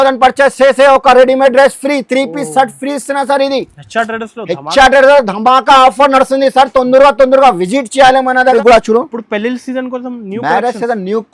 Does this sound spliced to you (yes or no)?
yes